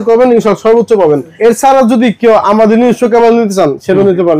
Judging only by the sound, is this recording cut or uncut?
cut